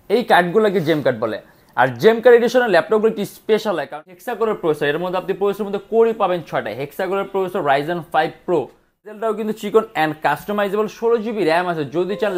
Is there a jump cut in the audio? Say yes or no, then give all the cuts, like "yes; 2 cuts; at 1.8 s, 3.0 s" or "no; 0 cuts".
yes; 2 cuts; at 4.0 s, 9.1 s